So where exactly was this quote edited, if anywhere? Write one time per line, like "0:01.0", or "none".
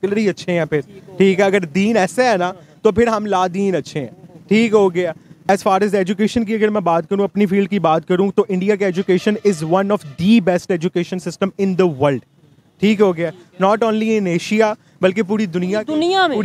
0:05.4